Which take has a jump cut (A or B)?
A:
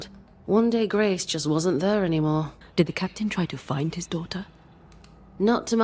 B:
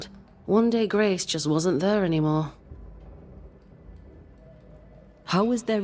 A